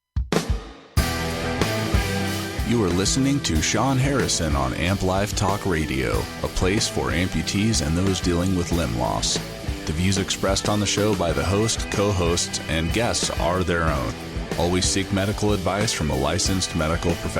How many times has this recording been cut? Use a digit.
1